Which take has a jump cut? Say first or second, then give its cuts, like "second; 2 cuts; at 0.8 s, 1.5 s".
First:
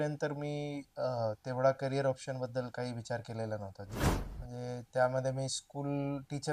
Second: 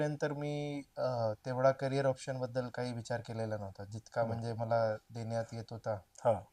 first; 1 cut; at 4.0 s